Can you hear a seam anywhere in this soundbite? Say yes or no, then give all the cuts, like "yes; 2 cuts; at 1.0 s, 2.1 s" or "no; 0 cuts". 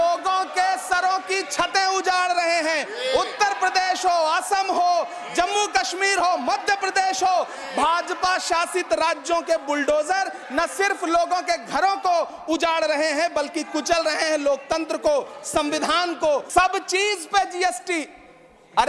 yes; 1 cut; at 16.5 s